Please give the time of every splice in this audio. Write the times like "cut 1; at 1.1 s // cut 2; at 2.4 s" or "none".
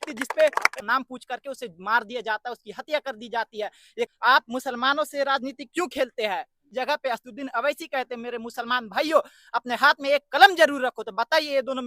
cut 1; at 0.8 s // cut 2; at 4.1 s // cut 3; at 6.6 s